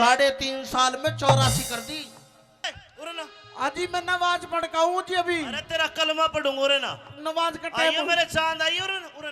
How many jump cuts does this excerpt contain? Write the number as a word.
one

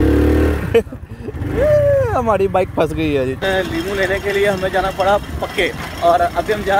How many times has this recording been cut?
two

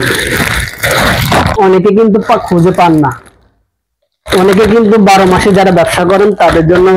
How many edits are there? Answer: one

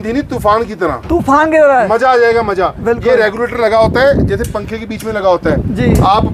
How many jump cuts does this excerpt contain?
zero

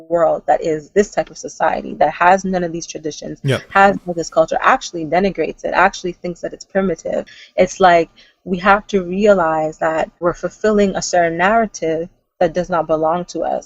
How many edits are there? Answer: two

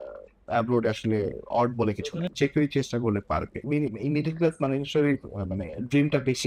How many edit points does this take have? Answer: two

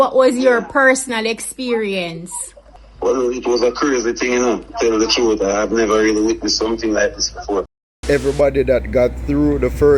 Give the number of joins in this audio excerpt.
one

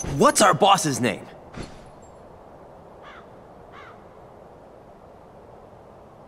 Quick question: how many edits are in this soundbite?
one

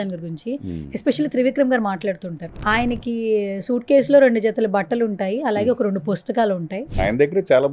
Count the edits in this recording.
two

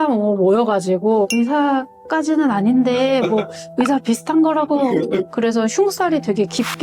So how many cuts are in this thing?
one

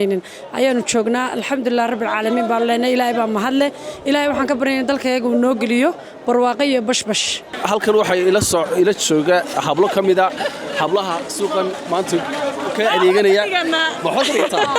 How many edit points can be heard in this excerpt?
one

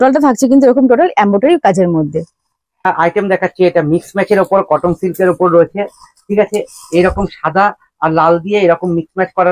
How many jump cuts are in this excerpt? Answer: one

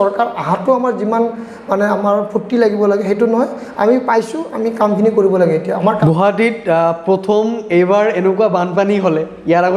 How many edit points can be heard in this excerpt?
one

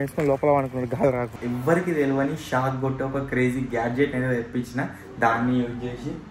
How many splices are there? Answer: one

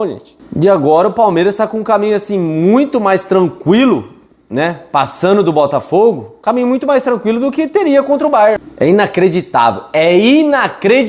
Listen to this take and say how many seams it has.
one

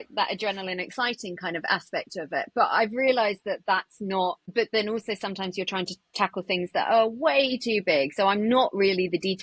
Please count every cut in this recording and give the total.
one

